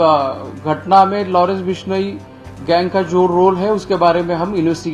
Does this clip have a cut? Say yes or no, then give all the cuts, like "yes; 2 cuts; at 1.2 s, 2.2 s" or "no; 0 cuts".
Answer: no; 0 cuts